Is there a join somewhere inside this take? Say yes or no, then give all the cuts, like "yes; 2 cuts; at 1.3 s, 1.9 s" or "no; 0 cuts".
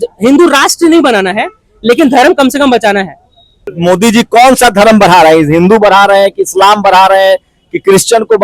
yes; 1 cut; at 3.7 s